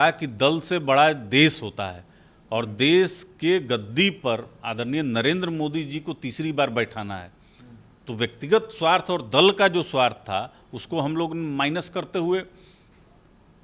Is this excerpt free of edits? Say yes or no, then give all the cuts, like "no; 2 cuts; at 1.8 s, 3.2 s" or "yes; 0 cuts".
yes; 0 cuts